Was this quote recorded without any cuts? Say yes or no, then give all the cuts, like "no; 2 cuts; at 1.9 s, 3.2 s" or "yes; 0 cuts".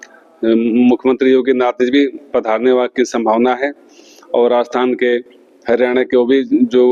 yes; 0 cuts